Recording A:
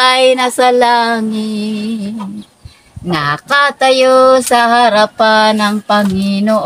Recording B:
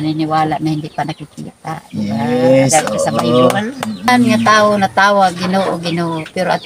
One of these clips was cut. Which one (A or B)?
B